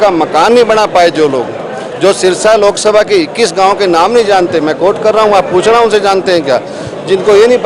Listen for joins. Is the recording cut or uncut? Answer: uncut